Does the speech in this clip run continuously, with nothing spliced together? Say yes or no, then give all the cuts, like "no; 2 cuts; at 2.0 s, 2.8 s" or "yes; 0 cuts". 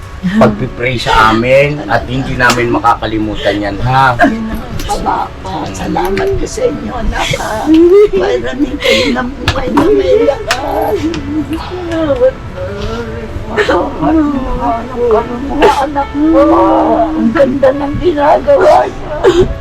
yes; 0 cuts